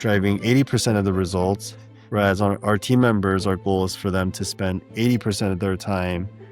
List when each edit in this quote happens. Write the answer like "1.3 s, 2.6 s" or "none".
none

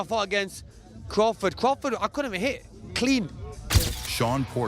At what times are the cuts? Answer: none

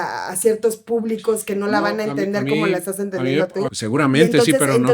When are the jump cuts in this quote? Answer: 3.7 s

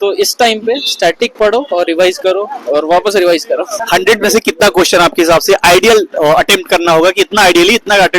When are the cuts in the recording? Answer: 3.8 s

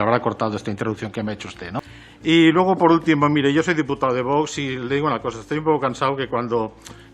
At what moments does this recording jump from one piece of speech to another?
1.8 s

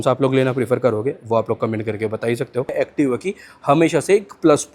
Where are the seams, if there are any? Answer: 2.7 s

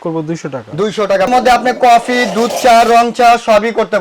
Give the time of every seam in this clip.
1.3 s

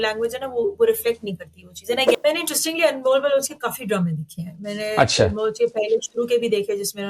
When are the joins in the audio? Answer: 2.1 s

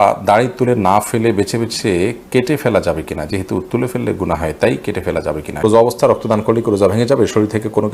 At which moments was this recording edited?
5.6 s

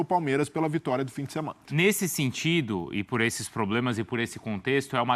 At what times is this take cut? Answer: 1.6 s

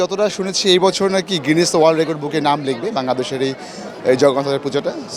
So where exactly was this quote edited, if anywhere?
none

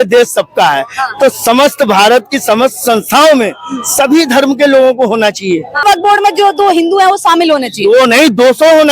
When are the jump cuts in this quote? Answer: 5.8 s

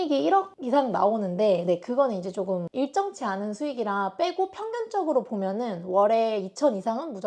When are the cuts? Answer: none

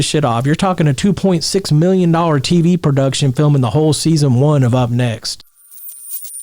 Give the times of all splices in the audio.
5.5 s

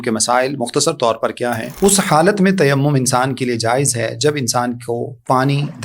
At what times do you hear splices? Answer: 1.7 s

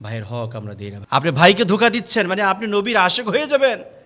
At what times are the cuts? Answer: 1.0 s

